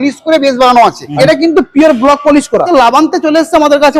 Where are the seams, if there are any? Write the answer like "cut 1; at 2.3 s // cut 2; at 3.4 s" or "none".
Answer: cut 1; at 1.0 s // cut 2; at 2.7 s